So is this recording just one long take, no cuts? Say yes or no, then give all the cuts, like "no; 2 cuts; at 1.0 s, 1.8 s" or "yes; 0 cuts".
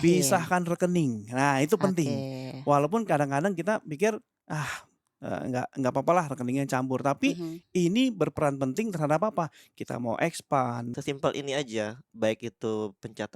no; 1 cut; at 10.9 s